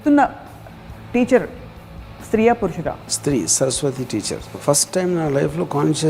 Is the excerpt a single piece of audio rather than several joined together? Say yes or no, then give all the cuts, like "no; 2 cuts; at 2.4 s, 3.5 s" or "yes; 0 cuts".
no; 2 cuts; at 3.1 s, 4.6 s